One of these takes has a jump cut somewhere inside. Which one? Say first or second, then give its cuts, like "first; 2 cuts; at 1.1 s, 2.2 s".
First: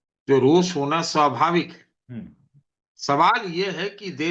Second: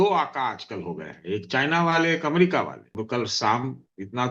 second; 1 cut; at 2.9 s